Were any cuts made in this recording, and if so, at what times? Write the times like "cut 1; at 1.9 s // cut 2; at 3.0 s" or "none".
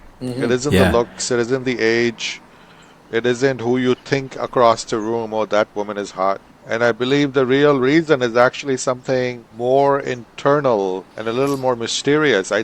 cut 1; at 6.5 s // cut 2; at 9.4 s // cut 3; at 11.1 s